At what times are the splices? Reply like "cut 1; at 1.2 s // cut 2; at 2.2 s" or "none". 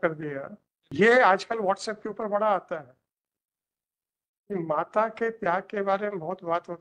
cut 1; at 0.9 s